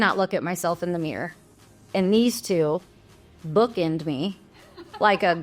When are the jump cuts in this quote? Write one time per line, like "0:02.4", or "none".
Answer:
none

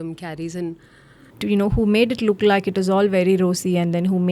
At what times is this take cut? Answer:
0:01.2

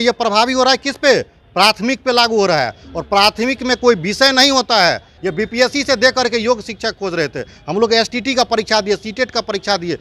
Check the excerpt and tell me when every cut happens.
0:05.1

